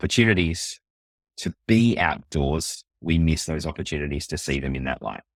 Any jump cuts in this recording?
no; 0 cuts

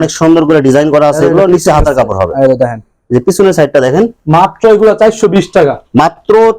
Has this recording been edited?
no; 0 cuts

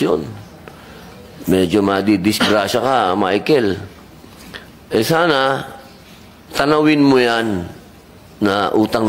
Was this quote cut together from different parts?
no; 0 cuts

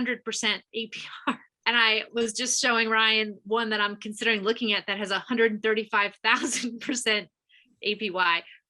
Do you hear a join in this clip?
yes; 1 cut; at 1.5 s

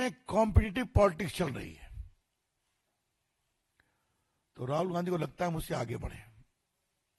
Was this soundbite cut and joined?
no; 0 cuts

